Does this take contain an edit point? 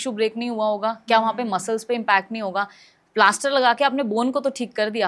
no; 0 cuts

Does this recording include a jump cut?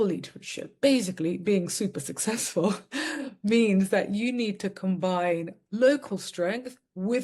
no; 0 cuts

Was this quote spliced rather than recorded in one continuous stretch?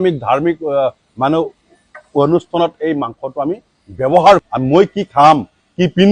yes; 1 cut; at 4.5 s

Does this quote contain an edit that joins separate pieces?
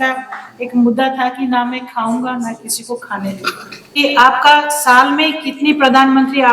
yes; 1 cut; at 4.0 s

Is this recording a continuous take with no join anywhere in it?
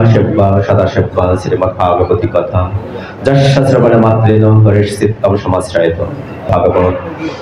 no; 1 cut; at 6.5 s

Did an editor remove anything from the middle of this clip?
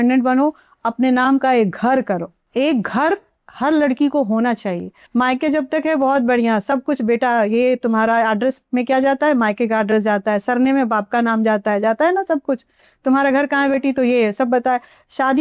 yes; 2 cuts; at 2.4 s, 5.0 s

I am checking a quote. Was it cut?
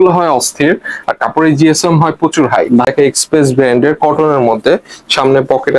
yes; 1 cut; at 2.9 s

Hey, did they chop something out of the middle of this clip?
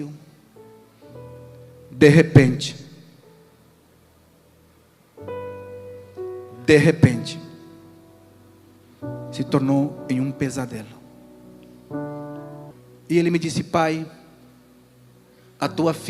yes; 1 cut; at 12.7 s

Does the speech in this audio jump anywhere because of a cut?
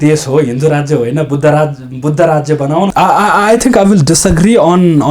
yes; 1 cut; at 2.9 s

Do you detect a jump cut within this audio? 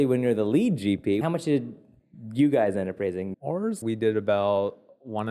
yes; 2 cuts; at 1.2 s, 3.4 s

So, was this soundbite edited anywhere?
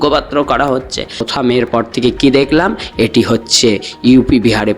yes; 1 cut; at 1.3 s

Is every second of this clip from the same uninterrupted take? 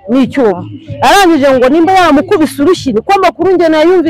yes; 0 cuts

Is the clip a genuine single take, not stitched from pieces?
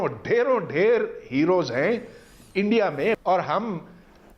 no; 1 cut; at 3.2 s

